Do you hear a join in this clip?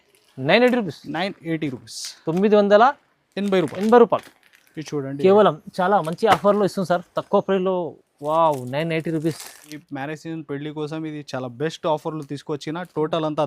yes; 1 cut; at 9.8 s

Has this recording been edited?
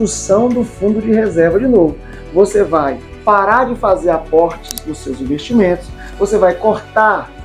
no; 0 cuts

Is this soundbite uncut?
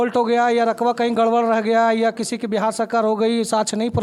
yes; 0 cuts

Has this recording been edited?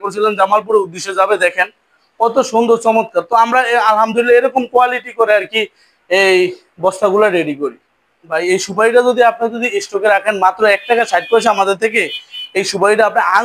yes; 1 cut; at 8.3 s

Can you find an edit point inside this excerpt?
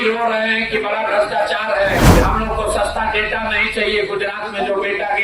yes; 1 cut; at 2.1 s

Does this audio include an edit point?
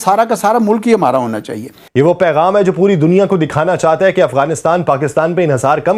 yes; 1 cut; at 1.8 s

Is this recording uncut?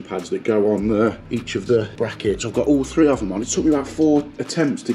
no; 2 cuts; at 1.2 s, 1.9 s

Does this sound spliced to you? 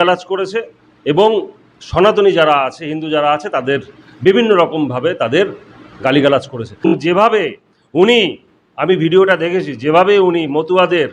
yes; 1 cut; at 6.9 s

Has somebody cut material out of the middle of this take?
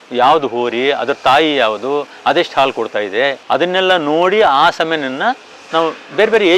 no; 0 cuts

